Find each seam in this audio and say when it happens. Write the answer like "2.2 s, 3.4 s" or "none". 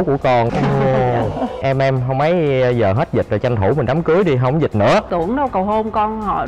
1.6 s, 5.1 s

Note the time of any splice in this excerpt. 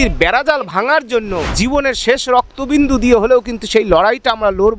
1.4 s

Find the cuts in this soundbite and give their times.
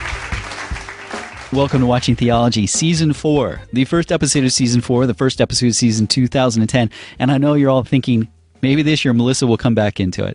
2.7 s

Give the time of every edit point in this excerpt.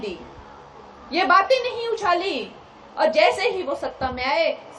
none

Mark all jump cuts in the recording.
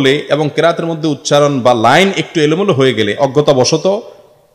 none

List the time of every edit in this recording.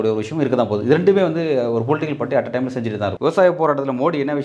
3.2 s

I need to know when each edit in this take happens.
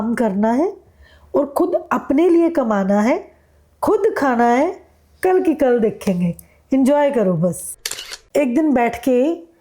7.8 s

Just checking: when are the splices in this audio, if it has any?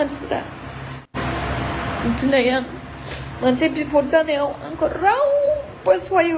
1.1 s

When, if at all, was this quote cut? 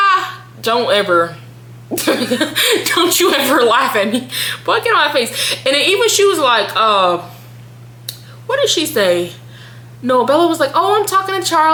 none

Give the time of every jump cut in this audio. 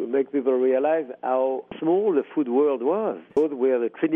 1.7 s, 3.2 s

